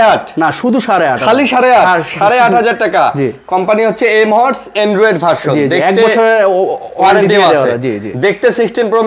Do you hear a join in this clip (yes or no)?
no